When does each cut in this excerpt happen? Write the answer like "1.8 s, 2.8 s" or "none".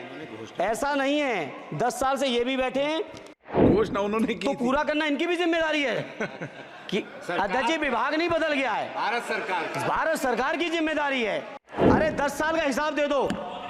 3.5 s, 11.6 s